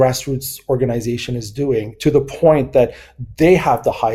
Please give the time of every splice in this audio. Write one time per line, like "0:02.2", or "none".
none